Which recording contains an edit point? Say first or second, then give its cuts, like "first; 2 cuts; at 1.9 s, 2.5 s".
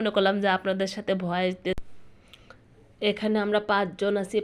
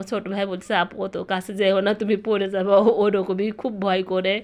first; 1 cut; at 1.8 s